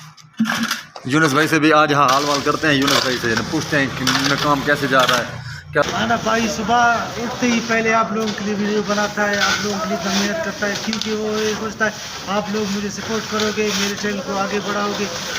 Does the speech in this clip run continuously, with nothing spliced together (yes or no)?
no